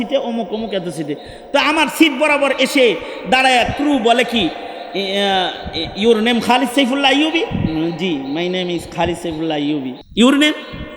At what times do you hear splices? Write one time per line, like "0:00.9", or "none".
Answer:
0:10.0